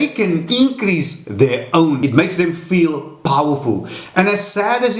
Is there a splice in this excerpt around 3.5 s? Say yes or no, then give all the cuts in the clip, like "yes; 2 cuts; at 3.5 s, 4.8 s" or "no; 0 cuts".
no; 1 cut; at 2.0 s